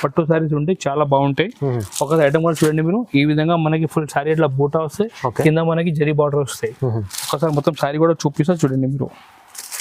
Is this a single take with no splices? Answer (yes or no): yes